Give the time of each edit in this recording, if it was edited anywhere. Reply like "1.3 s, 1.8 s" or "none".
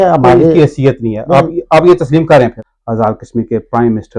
2.6 s